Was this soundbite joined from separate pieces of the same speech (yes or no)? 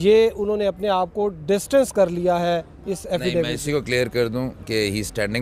no